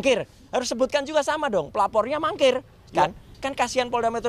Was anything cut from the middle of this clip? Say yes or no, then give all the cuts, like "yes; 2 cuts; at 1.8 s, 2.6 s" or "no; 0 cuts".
yes; 1 cut; at 3.3 s